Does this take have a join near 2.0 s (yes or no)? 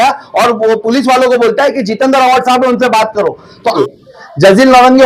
no